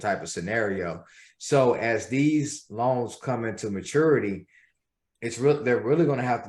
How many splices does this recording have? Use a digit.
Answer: 0